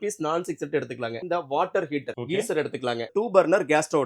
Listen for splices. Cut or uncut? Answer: cut